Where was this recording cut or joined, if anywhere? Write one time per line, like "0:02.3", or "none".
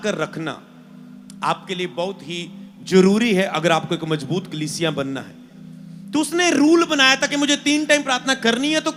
none